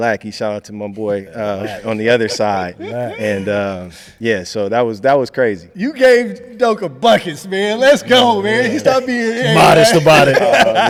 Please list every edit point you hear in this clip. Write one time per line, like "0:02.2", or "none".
none